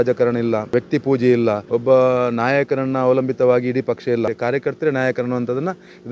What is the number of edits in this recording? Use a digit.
3